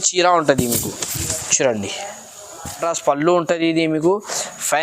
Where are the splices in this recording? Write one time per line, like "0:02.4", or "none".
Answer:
0:02.8